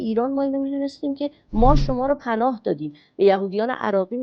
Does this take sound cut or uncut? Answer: uncut